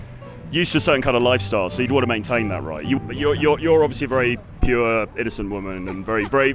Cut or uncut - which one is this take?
cut